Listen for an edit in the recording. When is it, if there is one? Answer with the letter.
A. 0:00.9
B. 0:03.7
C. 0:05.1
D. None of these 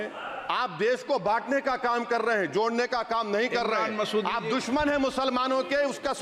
D